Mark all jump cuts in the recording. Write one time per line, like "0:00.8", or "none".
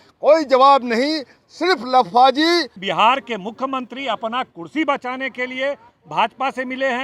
0:02.8